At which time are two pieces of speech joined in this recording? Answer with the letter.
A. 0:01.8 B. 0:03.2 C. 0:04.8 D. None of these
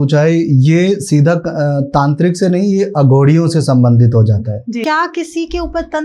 C